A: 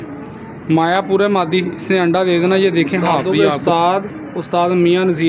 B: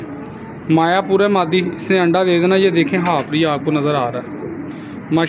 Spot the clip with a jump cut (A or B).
A